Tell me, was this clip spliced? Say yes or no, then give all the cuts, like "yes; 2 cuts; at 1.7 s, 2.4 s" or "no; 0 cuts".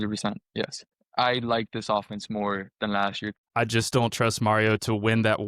yes; 2 cuts; at 0.9 s, 3.4 s